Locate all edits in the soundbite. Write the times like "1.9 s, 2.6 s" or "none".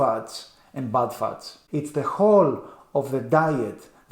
1.5 s